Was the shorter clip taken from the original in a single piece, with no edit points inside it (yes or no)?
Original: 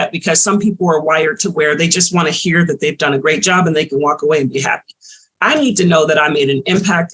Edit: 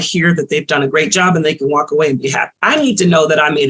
no